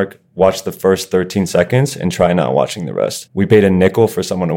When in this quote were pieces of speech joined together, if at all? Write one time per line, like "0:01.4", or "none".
0:03.2